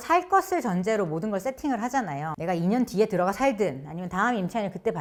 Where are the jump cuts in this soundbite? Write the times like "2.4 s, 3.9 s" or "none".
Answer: none

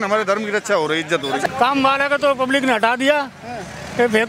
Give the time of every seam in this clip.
1.4 s

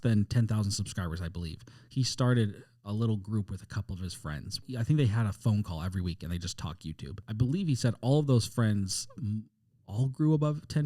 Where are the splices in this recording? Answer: 4.6 s, 7.2 s

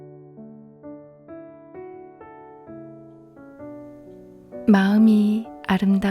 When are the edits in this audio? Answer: 4.7 s

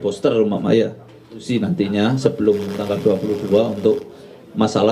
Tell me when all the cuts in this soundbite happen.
1.4 s

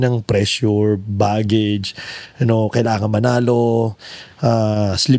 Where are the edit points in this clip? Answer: none

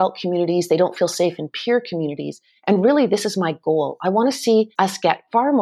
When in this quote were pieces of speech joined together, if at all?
none

